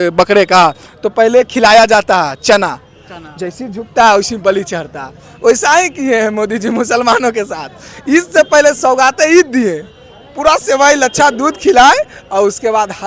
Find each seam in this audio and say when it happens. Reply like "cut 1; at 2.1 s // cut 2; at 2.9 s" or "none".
none